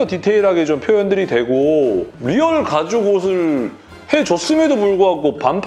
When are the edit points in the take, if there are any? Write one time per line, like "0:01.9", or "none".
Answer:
none